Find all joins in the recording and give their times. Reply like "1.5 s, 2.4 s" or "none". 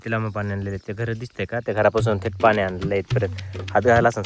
none